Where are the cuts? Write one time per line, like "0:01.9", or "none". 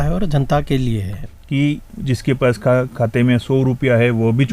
0:01.3